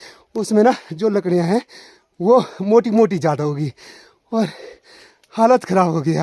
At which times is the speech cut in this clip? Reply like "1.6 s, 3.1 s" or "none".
none